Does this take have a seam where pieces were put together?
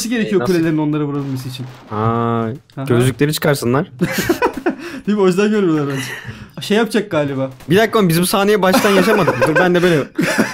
no; 0 cuts

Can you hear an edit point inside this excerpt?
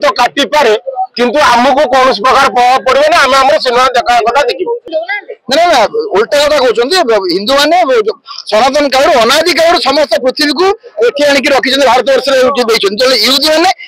yes; 1 cut; at 4.8 s

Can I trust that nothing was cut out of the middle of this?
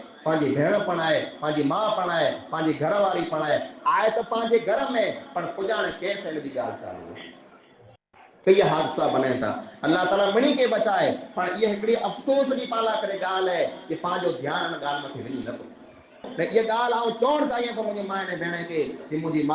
no; 1 cut; at 16.3 s

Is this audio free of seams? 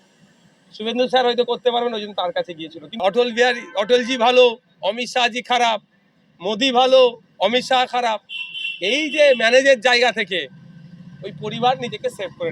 no; 1 cut; at 3.0 s

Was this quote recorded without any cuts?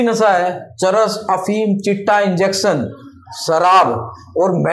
yes; 0 cuts

